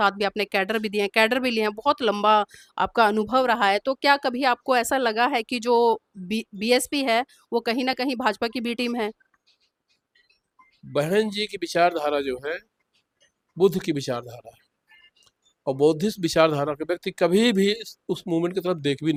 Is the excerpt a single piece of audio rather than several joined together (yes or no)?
yes